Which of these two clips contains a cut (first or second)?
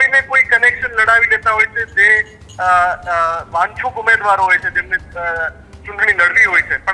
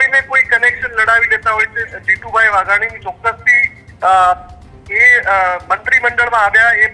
second